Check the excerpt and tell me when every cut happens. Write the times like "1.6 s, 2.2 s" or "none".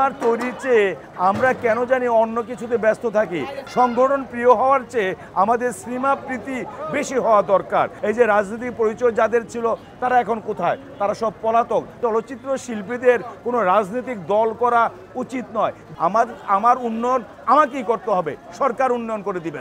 3.6 s, 7.9 s, 11.9 s, 15.8 s